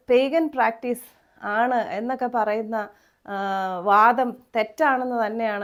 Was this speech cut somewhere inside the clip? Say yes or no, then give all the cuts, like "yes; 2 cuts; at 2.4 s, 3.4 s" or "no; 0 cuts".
no; 0 cuts